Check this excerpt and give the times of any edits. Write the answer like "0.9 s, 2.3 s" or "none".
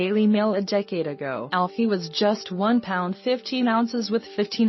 1.4 s